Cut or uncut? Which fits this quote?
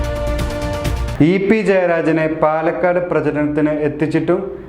cut